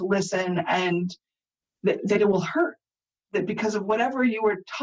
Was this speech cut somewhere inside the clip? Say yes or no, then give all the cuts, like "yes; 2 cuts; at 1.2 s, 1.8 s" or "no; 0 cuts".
no; 0 cuts